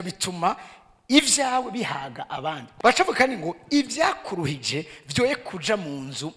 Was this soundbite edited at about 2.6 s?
yes; 1 cut; at 2.6 s

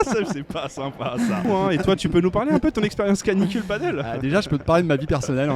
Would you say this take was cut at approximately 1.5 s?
yes; 1 cut; at 1.5 s

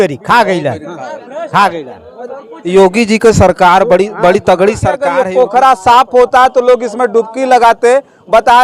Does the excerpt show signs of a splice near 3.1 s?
no; 1 cut; at 5.1 s

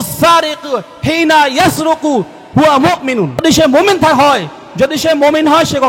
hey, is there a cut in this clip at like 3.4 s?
yes; 1 cut; at 3.4 s

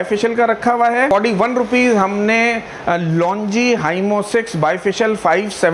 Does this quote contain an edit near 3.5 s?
no; 1 cut; at 1.1 s

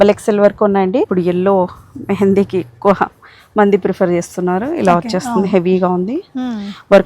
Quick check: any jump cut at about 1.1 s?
yes; 1 cut; at 1.1 s

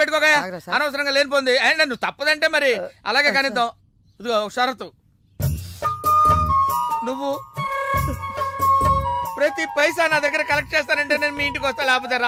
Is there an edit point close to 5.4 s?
no; 0 cuts

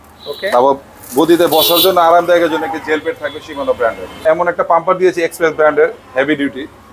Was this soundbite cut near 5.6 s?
no; 1 cut; at 4.2 s

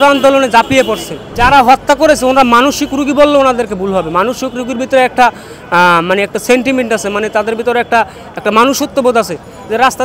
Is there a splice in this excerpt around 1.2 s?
yes; 1 cut; at 1.2 s

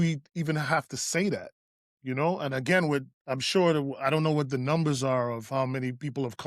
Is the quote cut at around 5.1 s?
no; 1 cut; at 2.0 s

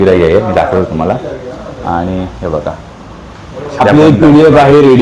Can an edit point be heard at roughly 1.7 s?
no; 1 cut; at 3.8 s

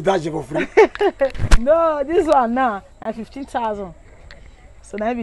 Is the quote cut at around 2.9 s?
no; 0 cuts

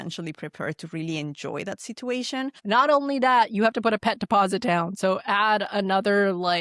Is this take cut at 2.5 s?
yes; 1 cut; at 2.5 s

